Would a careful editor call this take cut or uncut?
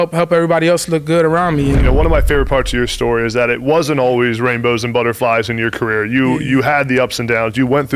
cut